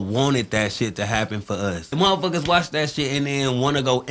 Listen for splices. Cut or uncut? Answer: cut